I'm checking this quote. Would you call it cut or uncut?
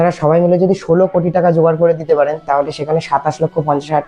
uncut